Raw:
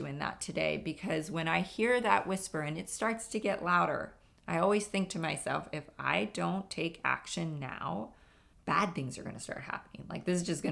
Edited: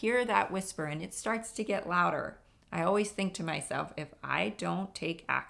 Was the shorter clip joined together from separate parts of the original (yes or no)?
no